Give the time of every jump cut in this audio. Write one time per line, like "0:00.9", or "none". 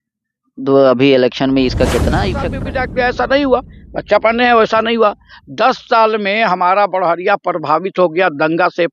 0:02.6